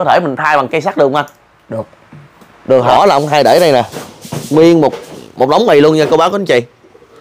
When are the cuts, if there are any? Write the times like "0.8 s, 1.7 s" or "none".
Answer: 2.9 s